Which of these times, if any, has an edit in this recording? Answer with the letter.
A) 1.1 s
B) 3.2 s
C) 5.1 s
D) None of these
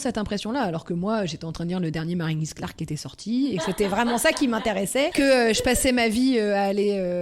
C